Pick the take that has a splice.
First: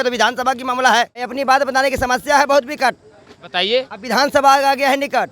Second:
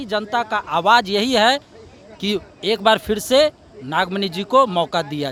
first; 1 cut; at 1.3 s

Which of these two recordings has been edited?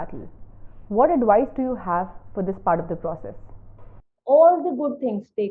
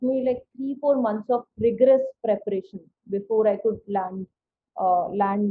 first; 1 cut; at 3.9 s

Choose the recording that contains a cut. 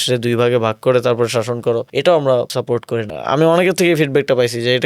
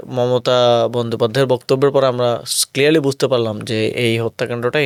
first; 2 cuts; at 1.9 s, 2.9 s

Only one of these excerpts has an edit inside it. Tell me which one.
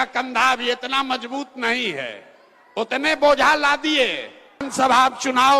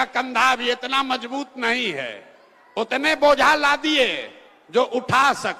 first; 1 cut; at 4.7 s

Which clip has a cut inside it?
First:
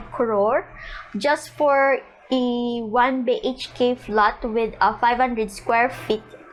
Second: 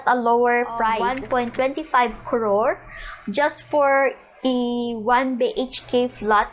second; 1 cut; at 1.0 s

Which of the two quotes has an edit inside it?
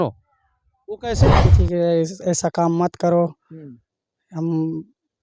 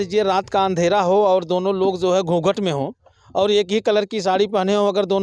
first; 1 cut; at 1.5 s

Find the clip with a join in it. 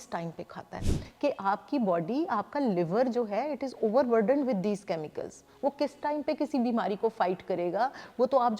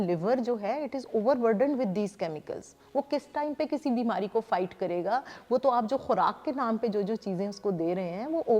first; 1 cut; at 1.0 s

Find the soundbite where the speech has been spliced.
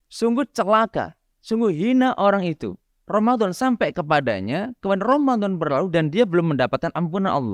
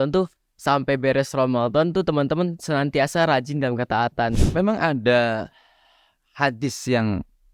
second; 1 cut; at 4.4 s

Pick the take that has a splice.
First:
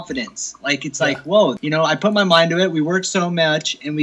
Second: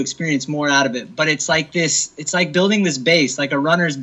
first; 1 cut; at 1.6 s

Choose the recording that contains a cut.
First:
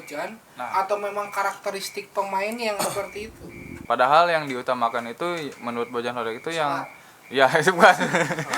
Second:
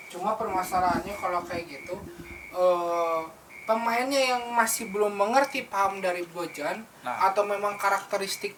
first; 1 cut; at 3.8 s

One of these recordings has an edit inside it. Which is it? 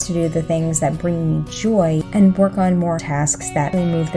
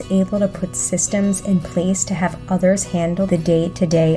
first; 2 cuts; at 2.1 s, 3.2 s

